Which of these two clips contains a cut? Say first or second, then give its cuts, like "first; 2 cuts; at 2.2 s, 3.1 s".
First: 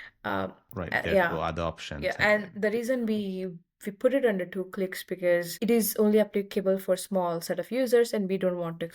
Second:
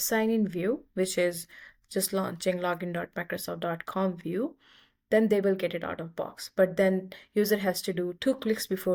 first; 1 cut; at 5.5 s